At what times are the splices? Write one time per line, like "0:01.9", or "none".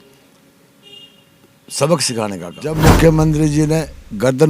0:02.8